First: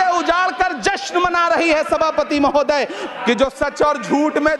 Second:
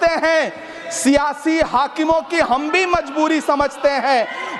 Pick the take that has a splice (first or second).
first